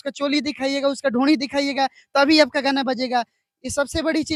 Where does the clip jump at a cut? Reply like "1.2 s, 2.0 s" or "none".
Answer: none